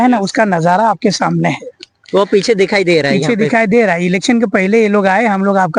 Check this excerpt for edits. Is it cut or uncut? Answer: uncut